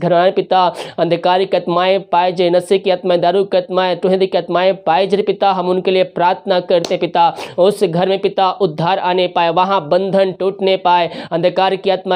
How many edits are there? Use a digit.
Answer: 0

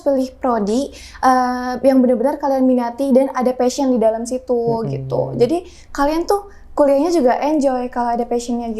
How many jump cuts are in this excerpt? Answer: 0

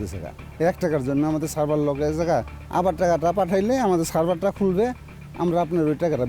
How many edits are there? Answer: 1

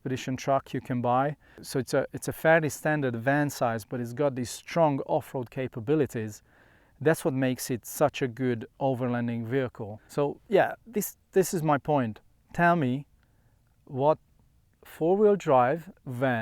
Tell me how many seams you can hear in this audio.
2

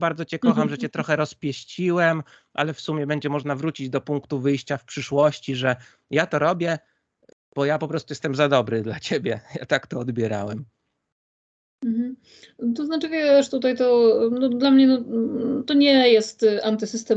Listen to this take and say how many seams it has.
0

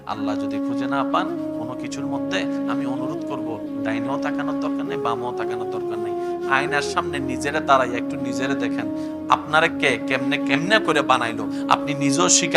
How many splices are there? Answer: 0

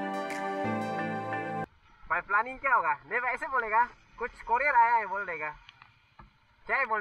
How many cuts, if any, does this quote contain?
1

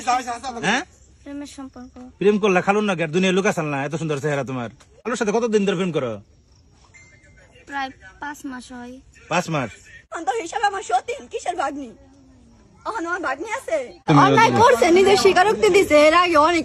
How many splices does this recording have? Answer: 3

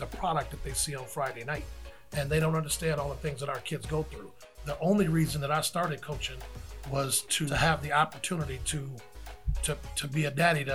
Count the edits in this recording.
2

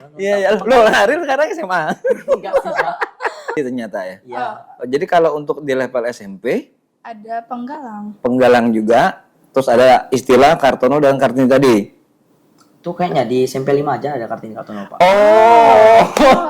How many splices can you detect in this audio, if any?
1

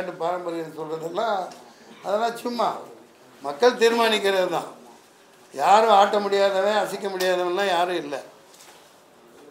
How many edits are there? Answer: 0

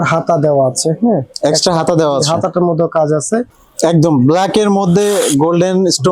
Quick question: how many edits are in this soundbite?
1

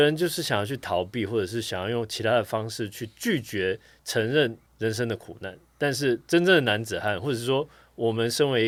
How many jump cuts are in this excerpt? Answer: 0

